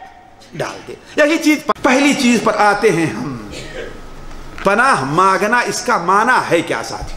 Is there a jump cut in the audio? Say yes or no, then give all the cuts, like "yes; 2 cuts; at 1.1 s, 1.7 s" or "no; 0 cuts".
yes; 1 cut; at 1.7 s